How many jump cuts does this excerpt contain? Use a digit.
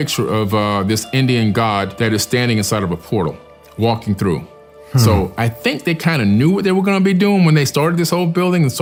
0